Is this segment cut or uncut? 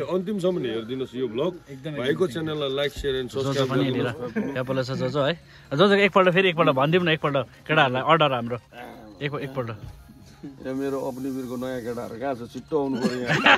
cut